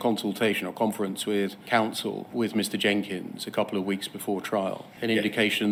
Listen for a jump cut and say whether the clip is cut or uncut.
uncut